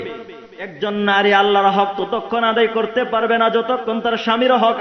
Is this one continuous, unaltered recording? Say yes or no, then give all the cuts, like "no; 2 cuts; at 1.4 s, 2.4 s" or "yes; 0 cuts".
yes; 0 cuts